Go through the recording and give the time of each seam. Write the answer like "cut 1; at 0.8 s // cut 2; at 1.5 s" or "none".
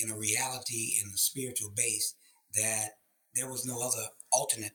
none